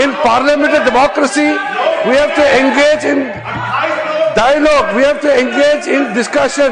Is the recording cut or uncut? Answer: uncut